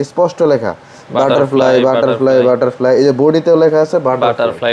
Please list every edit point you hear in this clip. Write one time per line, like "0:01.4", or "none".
none

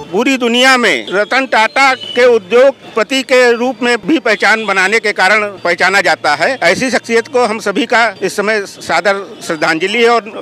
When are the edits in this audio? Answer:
0:01.0
0:02.0
0:02.8
0:04.0
0:05.6
0:06.6
0:08.2

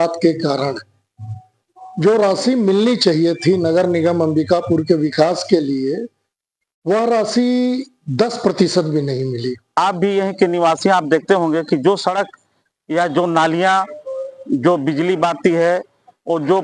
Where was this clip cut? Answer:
0:09.6

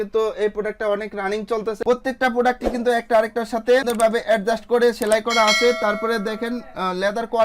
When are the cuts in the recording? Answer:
0:01.8

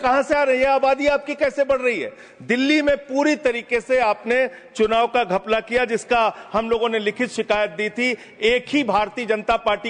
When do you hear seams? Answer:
none

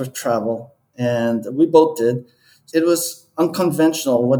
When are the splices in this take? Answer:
none

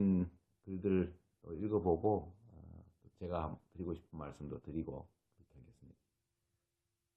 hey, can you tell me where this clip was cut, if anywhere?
0:03.4

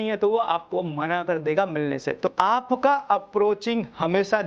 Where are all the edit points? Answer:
0:02.3

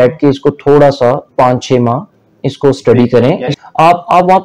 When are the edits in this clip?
0:03.5

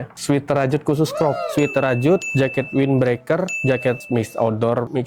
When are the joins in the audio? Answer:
0:01.5

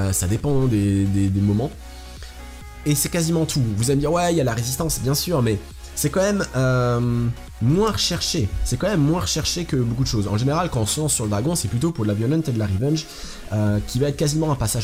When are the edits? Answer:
none

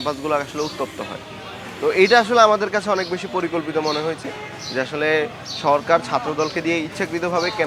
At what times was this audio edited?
none

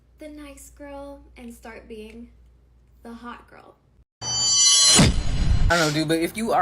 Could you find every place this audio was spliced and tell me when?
0:03.9

